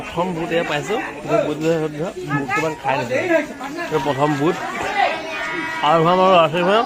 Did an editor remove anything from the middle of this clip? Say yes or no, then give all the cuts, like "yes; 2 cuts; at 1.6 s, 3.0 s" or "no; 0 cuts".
no; 0 cuts